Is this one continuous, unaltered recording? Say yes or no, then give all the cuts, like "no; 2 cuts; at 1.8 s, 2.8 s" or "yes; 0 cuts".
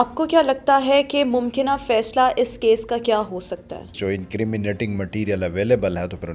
no; 1 cut; at 3.9 s